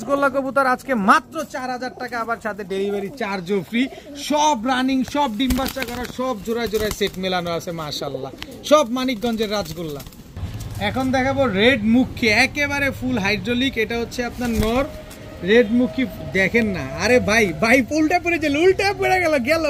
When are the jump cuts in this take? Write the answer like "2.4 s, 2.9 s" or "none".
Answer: none